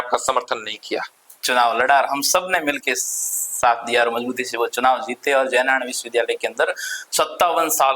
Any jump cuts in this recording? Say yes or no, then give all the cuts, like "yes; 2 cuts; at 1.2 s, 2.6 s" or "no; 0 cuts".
yes; 1 cut; at 1.2 s